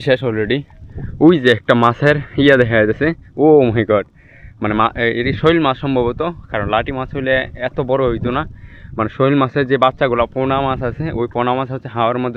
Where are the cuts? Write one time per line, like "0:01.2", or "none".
none